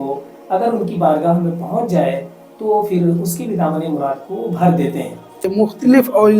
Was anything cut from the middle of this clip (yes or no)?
yes